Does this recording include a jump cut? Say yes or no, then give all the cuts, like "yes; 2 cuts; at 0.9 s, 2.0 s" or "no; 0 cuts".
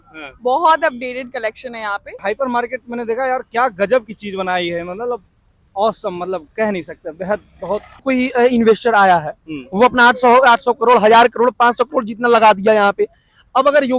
yes; 2 cuts; at 2.2 s, 8.0 s